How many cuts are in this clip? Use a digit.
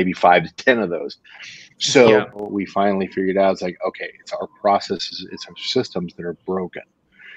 1